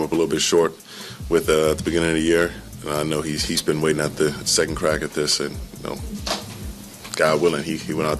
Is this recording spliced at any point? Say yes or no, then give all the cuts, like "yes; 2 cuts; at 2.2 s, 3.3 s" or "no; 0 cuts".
no; 0 cuts